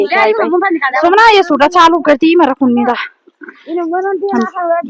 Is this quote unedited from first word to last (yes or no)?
yes